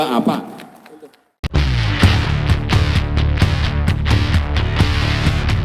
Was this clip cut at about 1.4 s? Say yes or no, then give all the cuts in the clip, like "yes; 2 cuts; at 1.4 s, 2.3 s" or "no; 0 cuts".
yes; 1 cut; at 1.4 s